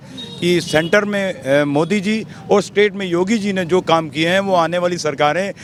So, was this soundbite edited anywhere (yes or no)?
no